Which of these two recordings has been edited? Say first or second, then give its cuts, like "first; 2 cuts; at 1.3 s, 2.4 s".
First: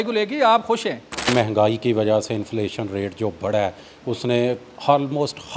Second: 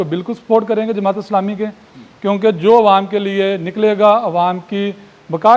first; 1 cut; at 1.3 s